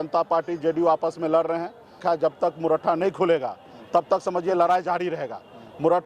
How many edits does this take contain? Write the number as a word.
one